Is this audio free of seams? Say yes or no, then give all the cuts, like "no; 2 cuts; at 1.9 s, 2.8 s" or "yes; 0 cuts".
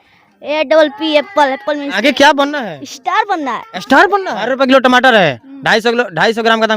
no; 2 cuts; at 1.9 s, 4.5 s